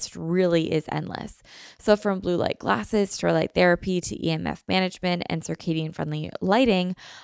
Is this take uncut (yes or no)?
yes